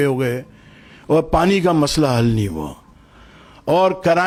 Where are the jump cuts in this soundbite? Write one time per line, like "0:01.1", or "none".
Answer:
none

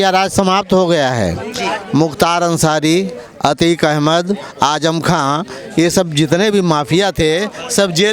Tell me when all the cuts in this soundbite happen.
none

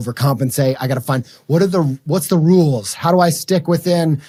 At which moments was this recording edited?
none

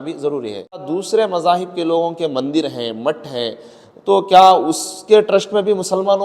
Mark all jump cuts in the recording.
0:00.9

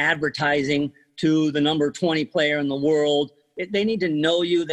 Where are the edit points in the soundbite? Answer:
0:03.4

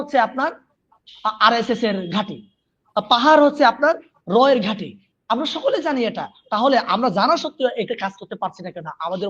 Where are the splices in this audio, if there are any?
none

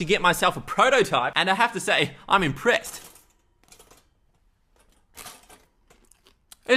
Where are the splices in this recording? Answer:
none

